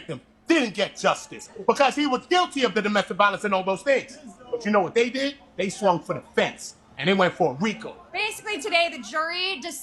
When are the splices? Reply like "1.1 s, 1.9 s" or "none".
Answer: none